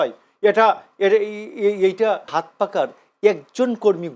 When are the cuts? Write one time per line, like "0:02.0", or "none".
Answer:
0:02.3